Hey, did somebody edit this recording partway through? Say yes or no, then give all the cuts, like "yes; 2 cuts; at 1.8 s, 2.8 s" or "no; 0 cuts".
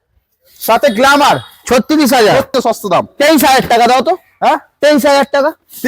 yes; 1 cut; at 2.5 s